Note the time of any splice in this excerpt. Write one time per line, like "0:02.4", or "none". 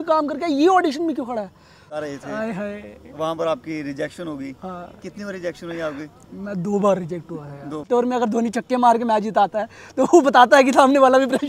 0:02.0
0:08.1